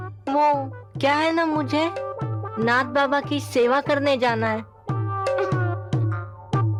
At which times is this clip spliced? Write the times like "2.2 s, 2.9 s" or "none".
none